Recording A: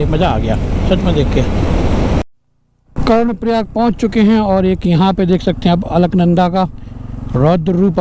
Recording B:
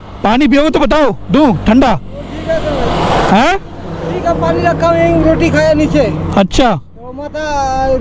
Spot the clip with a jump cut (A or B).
A